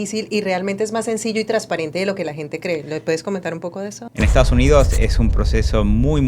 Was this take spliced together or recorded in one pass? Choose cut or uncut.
cut